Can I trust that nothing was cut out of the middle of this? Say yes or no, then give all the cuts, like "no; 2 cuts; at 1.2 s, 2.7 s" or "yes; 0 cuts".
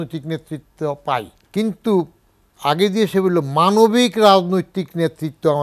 no; 1 cut; at 1.4 s